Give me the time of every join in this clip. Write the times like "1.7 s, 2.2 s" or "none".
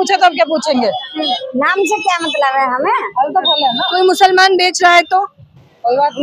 1.4 s